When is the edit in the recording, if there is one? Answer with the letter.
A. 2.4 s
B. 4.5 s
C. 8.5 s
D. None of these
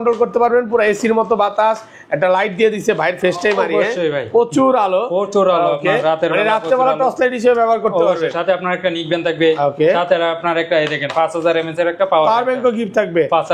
D